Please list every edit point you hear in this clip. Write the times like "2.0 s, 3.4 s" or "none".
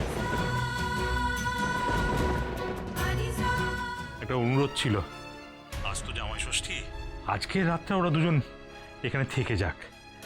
4.0 s